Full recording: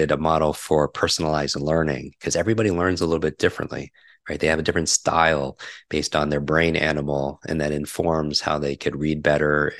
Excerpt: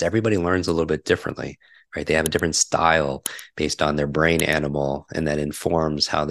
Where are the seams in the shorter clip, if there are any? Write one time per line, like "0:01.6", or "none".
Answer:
none